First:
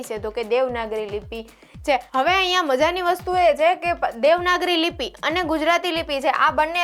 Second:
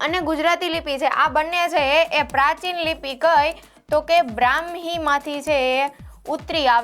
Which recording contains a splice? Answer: first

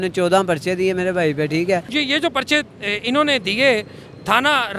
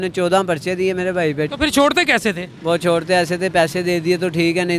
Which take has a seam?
second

